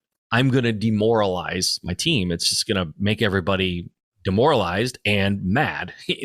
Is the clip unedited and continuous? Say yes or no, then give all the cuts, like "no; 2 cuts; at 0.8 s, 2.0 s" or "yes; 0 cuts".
yes; 0 cuts